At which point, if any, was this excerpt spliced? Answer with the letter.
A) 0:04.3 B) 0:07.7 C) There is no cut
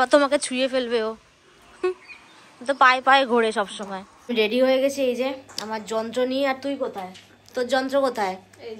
A